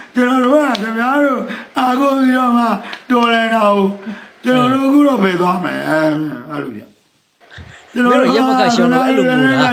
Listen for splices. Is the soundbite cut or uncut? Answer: uncut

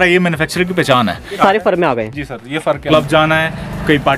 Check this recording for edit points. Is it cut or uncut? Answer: cut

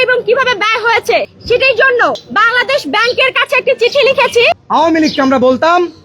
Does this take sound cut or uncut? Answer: cut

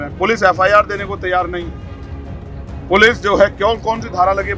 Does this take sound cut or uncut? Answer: uncut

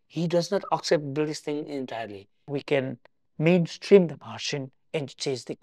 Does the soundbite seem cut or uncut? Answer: cut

